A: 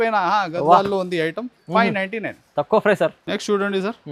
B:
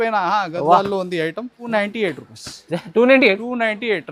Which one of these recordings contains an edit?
B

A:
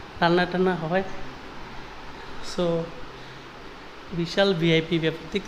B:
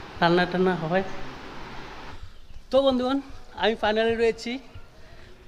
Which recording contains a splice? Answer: B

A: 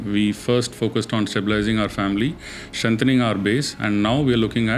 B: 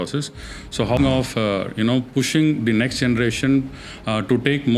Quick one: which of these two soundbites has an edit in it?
B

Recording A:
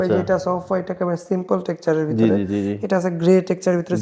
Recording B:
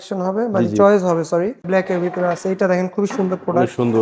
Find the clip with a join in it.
B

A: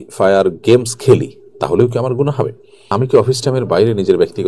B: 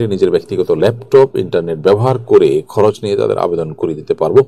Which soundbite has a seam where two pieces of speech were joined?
A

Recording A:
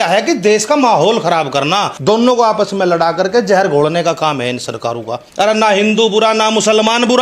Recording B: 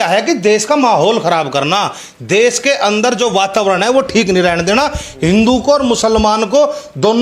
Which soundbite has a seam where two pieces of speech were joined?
A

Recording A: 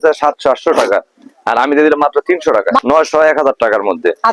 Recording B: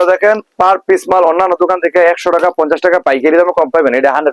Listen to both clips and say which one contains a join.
A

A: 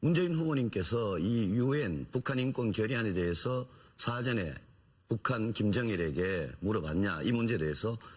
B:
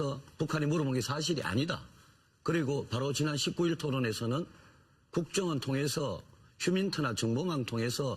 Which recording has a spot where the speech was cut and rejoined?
B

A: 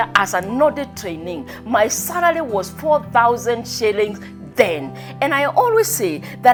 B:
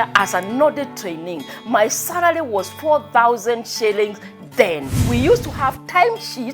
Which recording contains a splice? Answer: B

